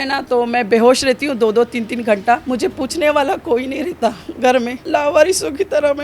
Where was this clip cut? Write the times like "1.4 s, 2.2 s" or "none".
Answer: 2.4 s, 4.8 s